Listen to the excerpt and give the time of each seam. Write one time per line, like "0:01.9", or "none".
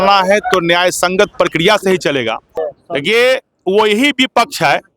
0:02.8

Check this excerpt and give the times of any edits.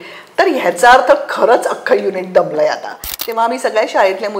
0:03.1

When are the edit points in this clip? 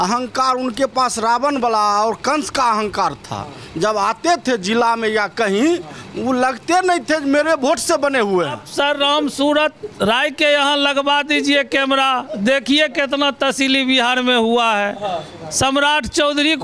0:08.6

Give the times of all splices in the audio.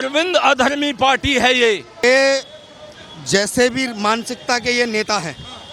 0:02.0

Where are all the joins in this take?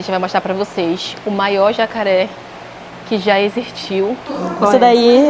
0:04.2

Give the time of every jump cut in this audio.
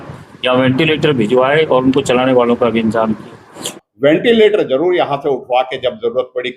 0:03.7

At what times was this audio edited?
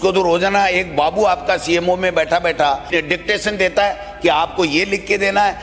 0:02.8

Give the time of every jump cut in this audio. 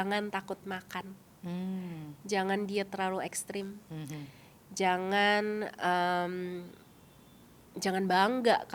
none

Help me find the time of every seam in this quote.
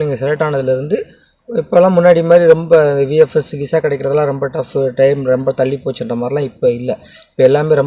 none

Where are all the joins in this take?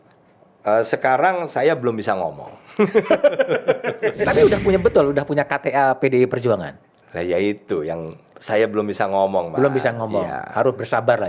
0:04.2

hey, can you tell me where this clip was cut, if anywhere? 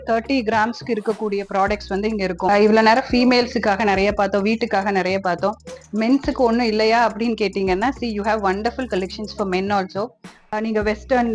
0:02.5
0:10.5

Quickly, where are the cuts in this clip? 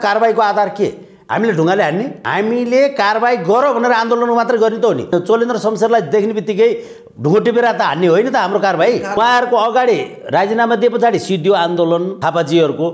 0:02.2
0:05.1
0:09.2
0:12.1

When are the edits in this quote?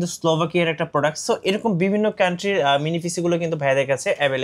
none

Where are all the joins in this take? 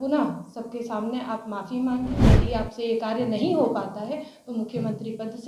0:02.2

